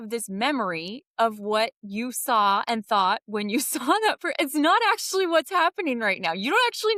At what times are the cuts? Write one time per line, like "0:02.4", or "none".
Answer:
none